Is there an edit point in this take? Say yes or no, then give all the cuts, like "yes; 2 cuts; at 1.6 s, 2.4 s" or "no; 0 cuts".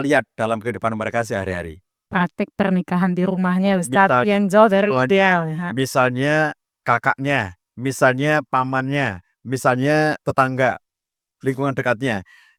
no; 0 cuts